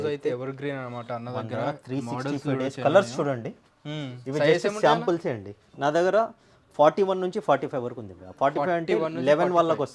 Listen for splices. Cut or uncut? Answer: uncut